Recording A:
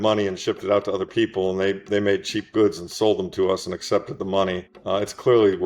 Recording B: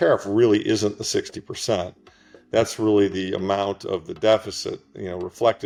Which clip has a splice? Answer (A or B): A